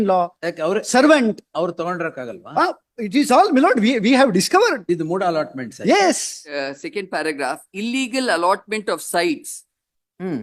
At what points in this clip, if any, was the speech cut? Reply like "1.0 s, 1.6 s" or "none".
6.4 s